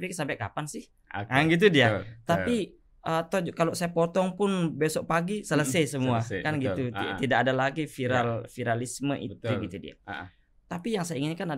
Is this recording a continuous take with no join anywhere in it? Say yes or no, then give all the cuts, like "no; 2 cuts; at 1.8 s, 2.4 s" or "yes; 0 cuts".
yes; 0 cuts